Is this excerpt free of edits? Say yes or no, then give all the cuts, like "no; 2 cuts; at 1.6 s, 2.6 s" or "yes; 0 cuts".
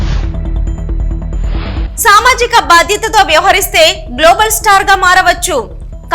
yes; 0 cuts